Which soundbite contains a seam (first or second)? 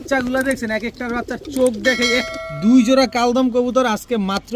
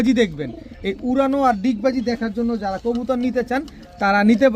first